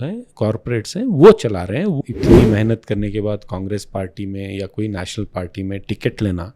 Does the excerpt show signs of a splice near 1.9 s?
yes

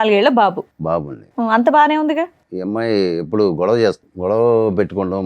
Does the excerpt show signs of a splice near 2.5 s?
yes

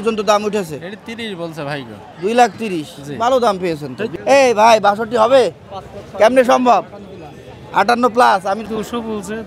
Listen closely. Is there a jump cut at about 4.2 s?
yes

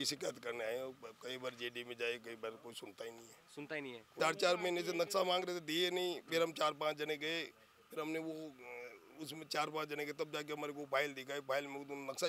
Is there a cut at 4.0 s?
yes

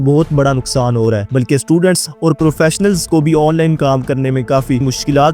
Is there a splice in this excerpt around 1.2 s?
yes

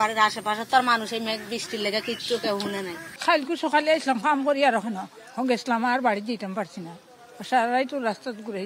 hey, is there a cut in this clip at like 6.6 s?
no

